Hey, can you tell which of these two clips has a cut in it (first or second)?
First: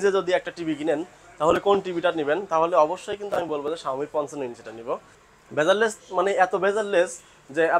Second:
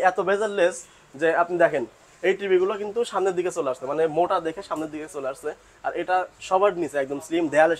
first